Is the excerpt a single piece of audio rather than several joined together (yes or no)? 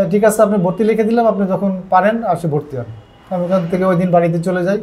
yes